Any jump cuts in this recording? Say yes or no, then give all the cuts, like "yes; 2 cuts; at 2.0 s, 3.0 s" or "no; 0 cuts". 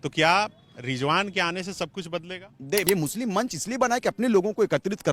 yes; 1 cut; at 2.8 s